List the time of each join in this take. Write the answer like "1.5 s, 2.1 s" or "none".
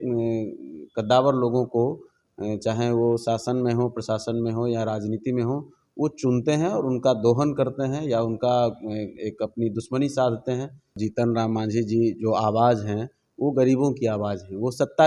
11.0 s